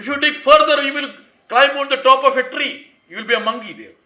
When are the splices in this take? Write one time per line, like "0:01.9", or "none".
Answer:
none